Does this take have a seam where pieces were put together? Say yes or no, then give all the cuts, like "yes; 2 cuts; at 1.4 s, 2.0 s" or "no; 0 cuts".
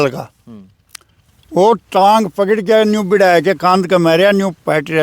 no; 0 cuts